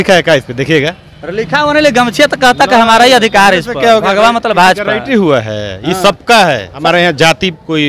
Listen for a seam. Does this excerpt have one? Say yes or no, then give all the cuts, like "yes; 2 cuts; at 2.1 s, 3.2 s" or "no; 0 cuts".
yes; 1 cut; at 6.7 s